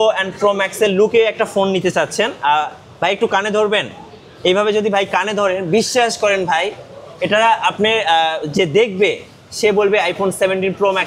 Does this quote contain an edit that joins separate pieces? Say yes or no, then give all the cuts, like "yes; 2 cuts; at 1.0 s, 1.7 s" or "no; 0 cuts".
no; 0 cuts